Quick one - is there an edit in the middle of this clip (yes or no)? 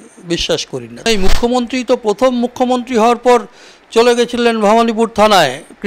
yes